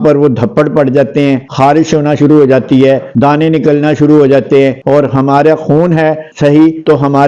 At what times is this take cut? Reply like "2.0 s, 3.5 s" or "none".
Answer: 4.8 s